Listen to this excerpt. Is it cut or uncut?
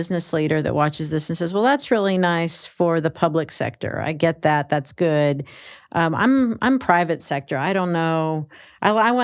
uncut